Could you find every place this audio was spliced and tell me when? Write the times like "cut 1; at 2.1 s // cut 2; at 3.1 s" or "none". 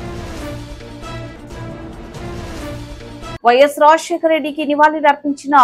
cut 1; at 3.4 s